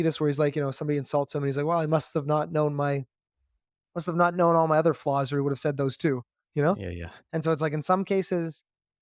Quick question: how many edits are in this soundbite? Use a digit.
0